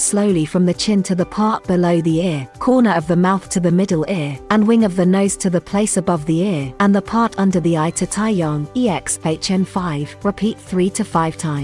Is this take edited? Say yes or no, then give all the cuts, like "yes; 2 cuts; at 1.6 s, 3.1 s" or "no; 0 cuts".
yes; 5 cuts; at 2.5 s, 4.3 s, 6.7 s, 8.6 s, 10.1 s